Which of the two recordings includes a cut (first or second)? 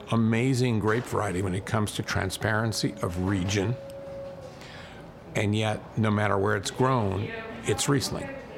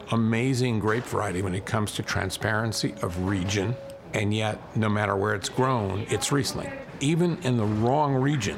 second